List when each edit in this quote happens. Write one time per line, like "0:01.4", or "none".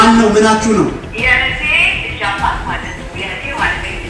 0:01.1